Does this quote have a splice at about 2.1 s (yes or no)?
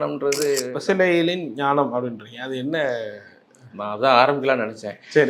no